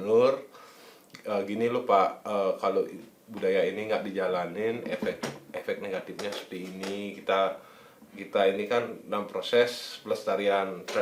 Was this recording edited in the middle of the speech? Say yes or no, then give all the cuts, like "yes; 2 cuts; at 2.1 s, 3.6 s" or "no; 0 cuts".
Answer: no; 0 cuts